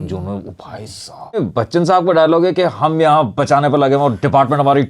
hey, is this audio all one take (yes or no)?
no